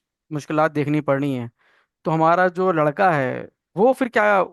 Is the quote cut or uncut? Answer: uncut